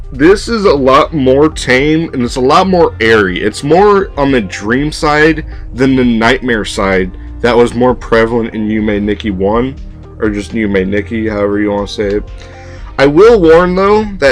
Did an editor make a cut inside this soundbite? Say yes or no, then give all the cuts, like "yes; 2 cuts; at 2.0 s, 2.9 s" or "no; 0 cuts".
yes; 1 cut; at 11.3 s